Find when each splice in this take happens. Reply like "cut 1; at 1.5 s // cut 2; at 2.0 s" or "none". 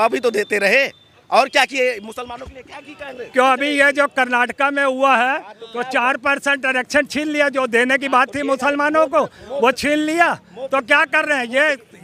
none